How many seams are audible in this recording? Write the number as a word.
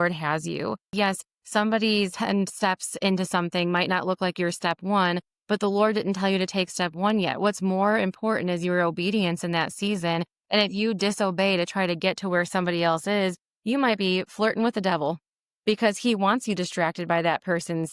two